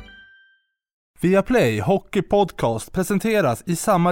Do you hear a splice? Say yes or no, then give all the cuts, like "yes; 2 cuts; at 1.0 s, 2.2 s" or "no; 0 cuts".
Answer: yes; 1 cut; at 1.0 s